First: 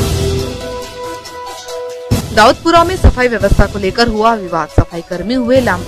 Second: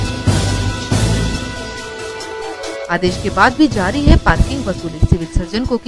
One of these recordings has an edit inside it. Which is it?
first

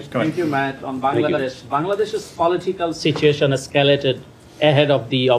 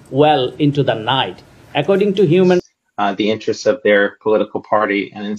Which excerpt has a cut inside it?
second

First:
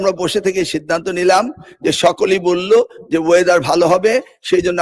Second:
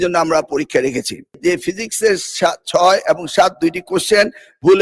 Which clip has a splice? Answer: second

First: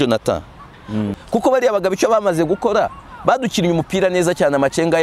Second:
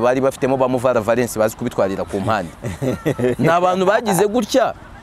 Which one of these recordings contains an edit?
first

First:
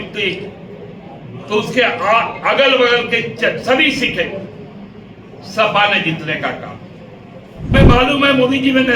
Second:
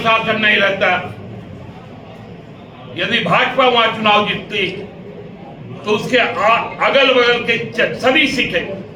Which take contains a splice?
first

